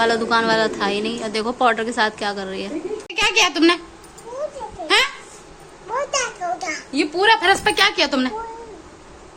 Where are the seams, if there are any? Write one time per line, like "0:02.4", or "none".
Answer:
0:03.1